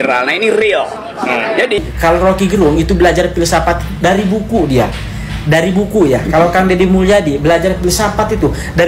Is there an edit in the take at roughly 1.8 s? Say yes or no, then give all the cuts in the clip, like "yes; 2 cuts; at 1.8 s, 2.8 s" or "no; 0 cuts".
yes; 1 cut; at 1.8 s